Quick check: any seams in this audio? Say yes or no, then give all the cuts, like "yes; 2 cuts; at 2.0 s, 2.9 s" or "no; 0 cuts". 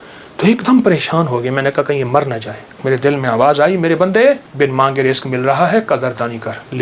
yes; 2 cuts; at 2.8 s, 4.5 s